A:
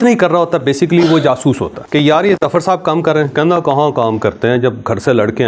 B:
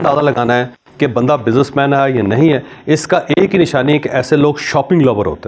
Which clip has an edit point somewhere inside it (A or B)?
A